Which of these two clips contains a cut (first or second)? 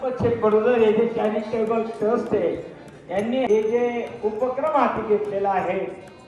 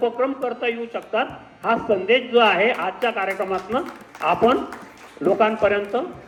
first